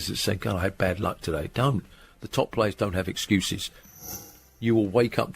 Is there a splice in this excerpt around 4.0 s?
yes; 1 cut; at 4.0 s

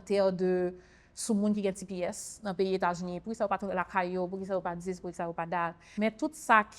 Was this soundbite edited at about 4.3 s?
no; 1 cut; at 5.8 s

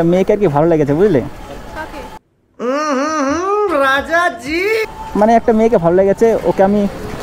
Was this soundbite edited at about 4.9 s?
yes; 2 cuts; at 2.0 s, 4.9 s

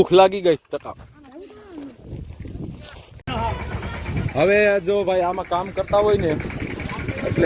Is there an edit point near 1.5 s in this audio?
no; 1 cut; at 3.2 s

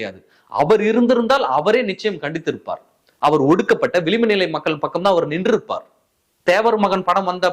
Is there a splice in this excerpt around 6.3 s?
yes; 1 cut; at 6.3 s

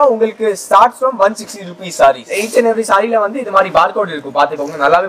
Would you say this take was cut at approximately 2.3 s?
yes; 1 cut; at 2.3 s

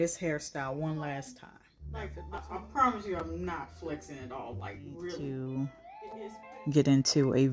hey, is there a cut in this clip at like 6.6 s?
no; 2 cuts; at 2.2 s, 5.2 s

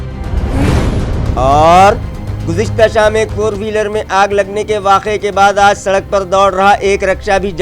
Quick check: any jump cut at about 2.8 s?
no; 1 cut; at 1.1 s

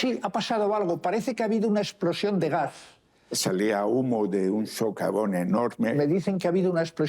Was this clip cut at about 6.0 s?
yes; 2 cuts; at 3.2 s, 6.0 s

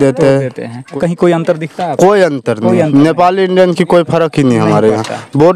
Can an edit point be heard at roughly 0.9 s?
yes; 1 cut; at 0.9 s

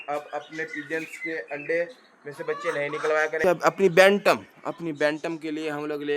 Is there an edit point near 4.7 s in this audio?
no; 1 cut; at 3.4 s

